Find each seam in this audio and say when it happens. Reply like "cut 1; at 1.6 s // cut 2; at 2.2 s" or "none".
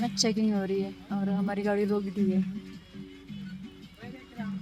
none